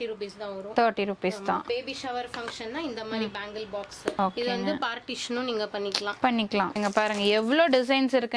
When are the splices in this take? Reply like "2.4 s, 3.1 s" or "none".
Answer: 1.6 s, 6.8 s